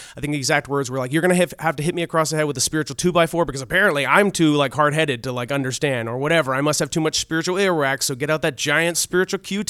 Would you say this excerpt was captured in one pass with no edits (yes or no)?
yes